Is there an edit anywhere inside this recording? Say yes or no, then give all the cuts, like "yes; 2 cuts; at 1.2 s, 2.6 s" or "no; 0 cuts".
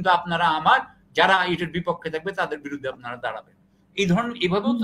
no; 0 cuts